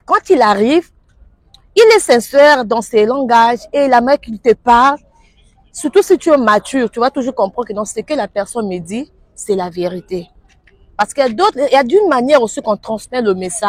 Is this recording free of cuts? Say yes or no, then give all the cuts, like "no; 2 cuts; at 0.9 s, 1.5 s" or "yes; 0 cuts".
yes; 0 cuts